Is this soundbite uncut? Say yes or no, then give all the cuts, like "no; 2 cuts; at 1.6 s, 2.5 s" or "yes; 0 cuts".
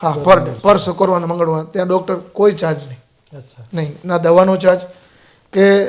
yes; 0 cuts